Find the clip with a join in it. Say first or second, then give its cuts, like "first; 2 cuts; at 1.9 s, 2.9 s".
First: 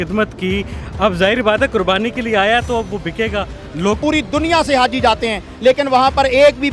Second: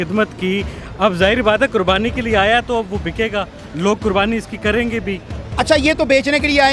first; 1 cut; at 4.0 s